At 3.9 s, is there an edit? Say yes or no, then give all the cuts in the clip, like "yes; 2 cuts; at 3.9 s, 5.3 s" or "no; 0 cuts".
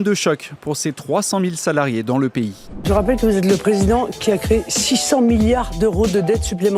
no; 1 cut; at 2.7 s